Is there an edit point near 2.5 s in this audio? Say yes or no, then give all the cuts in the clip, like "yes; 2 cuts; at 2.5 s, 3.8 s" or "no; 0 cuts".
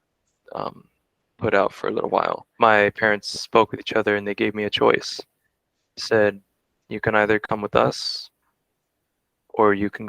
yes; 1 cut; at 2.5 s